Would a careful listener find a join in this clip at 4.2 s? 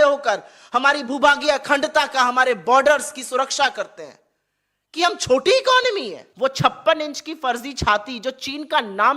no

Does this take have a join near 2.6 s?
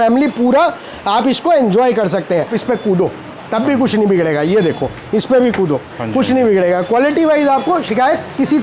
yes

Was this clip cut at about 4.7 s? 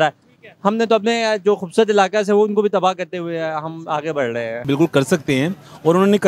yes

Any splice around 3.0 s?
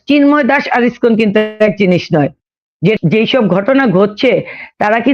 yes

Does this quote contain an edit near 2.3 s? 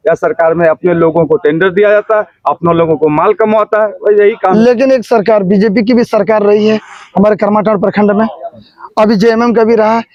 no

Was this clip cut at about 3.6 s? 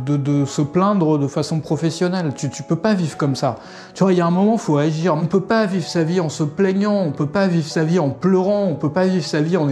no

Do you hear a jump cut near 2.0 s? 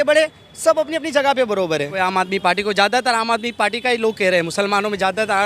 yes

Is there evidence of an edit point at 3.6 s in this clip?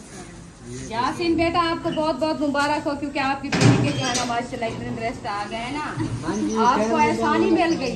no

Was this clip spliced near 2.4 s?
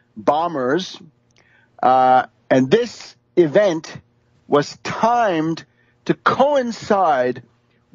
no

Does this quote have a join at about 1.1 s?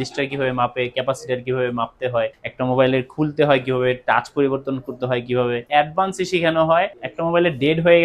no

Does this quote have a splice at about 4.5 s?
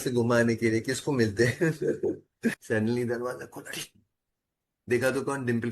no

